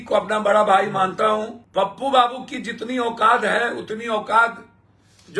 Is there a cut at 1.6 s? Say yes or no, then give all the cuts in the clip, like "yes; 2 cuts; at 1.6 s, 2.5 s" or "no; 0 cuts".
yes; 1 cut; at 1.6 s